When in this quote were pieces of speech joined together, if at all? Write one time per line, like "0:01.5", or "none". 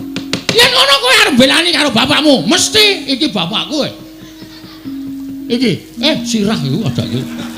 0:01.2